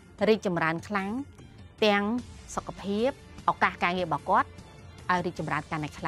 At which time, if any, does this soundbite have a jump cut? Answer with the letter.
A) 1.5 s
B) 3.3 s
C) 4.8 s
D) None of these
B